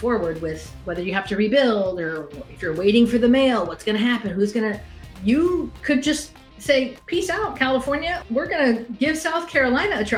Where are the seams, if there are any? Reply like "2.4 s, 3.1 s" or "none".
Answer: none

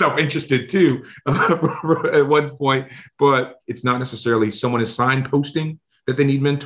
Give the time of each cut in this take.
3.6 s

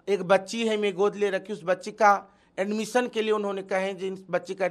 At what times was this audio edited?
none

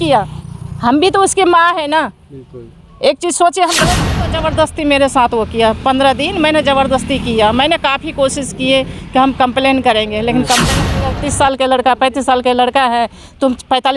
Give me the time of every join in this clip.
4.2 s, 11.1 s

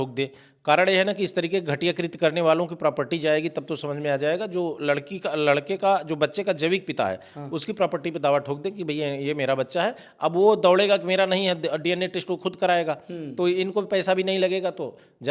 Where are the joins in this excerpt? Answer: none

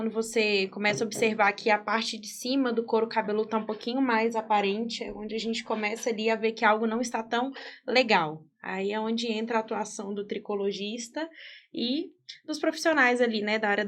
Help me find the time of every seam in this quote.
none

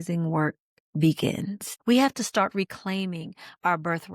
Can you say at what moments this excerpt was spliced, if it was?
1.7 s

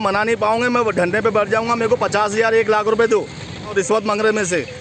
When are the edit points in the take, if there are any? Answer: 3.7 s

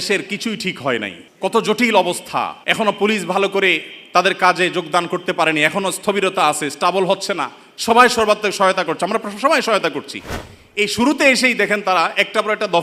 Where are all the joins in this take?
1.2 s, 2.6 s

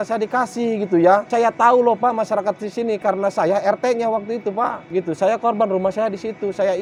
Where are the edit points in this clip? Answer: none

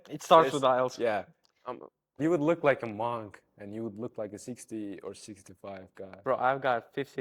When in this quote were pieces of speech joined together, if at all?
2.2 s

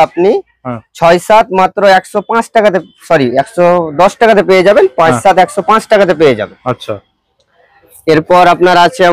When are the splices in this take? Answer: none

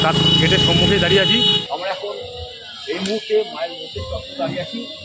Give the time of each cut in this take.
1.6 s

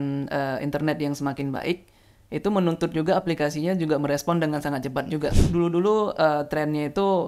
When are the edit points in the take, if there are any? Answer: 5.3 s

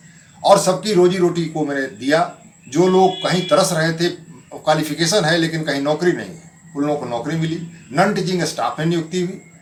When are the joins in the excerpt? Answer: none

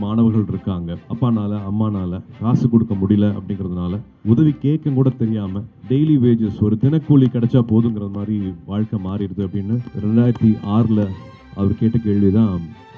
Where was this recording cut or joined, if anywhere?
1.0 s, 4.1 s

